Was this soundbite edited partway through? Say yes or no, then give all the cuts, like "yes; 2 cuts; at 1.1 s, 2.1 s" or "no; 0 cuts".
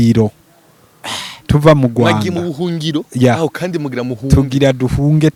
no; 0 cuts